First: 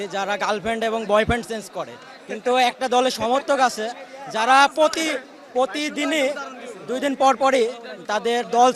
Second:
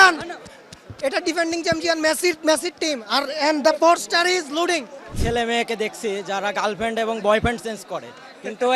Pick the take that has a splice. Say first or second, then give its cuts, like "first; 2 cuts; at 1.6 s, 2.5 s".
second; 1 cut; at 5.1 s